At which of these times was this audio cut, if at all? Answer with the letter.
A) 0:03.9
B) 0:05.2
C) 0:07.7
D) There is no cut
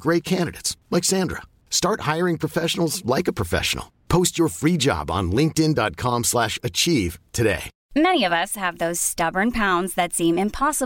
C